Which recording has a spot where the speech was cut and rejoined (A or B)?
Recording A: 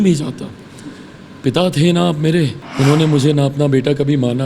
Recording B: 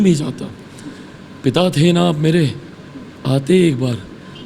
A